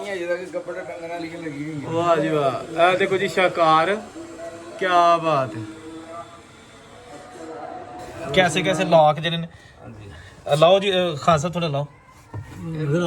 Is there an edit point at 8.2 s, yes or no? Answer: yes